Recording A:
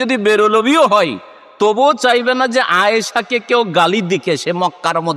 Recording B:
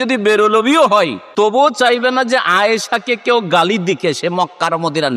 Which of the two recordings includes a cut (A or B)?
B